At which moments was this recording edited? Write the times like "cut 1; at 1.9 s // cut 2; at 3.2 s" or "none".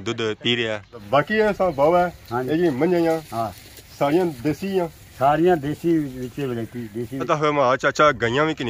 cut 1; at 0.9 s // cut 2; at 7.2 s